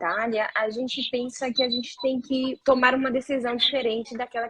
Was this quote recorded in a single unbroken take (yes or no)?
no